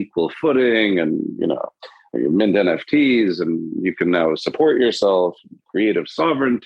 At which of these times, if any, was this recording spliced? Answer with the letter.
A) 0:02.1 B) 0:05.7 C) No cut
A